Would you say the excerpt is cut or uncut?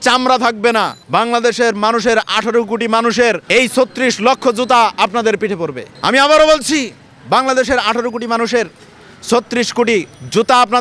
cut